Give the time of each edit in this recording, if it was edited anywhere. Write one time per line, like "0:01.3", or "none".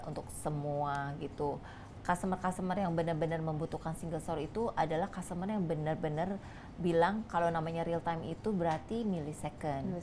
none